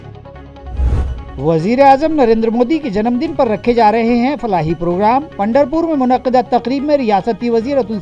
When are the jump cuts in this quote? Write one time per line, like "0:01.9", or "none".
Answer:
0:01.1

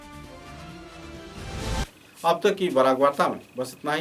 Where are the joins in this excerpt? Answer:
none

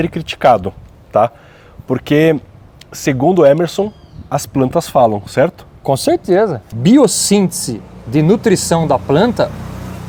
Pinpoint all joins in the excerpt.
0:06.8

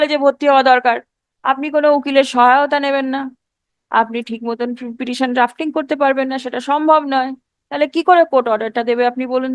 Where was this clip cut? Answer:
none

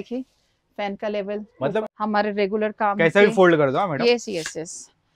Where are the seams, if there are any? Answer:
0:01.8

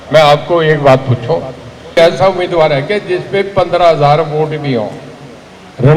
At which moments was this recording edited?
0:02.0

